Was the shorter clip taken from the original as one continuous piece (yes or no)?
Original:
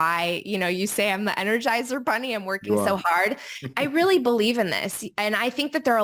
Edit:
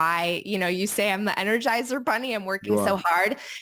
yes